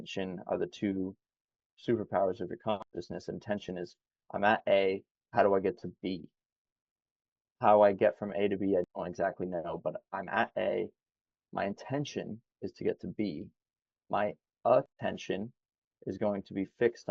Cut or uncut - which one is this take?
uncut